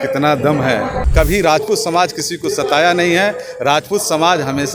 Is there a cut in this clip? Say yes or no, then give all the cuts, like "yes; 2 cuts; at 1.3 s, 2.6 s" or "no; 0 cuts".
yes; 1 cut; at 1.0 s